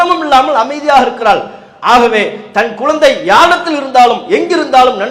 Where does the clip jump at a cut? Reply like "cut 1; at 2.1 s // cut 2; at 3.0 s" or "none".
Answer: none